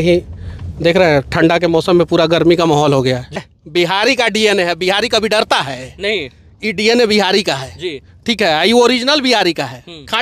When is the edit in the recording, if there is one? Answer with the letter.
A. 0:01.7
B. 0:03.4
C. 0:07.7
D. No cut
B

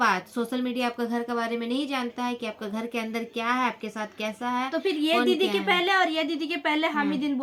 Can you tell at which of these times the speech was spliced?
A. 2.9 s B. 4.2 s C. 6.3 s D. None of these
D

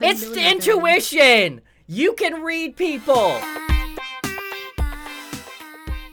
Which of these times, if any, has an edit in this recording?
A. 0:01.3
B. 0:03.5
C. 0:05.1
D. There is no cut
B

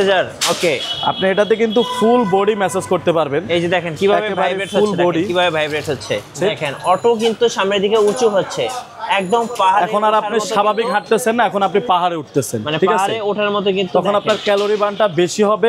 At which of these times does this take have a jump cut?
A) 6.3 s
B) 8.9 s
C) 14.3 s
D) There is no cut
A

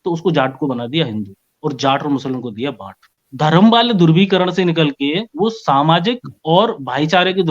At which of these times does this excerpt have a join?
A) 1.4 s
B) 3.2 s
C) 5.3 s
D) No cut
B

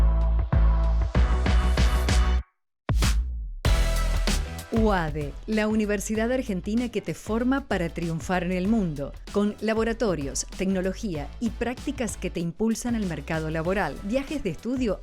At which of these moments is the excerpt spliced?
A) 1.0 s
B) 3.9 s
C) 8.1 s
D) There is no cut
A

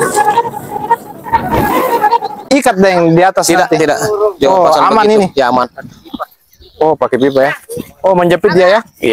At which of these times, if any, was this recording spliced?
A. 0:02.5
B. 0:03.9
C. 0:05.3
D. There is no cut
A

